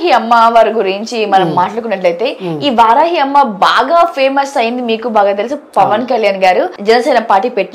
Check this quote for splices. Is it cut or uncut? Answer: cut